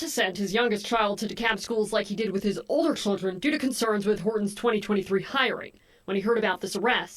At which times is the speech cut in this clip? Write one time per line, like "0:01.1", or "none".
0:06.2